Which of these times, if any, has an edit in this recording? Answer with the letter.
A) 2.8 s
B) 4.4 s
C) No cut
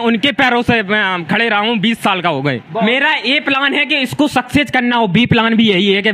A